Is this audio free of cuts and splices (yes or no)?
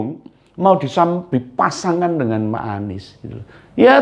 yes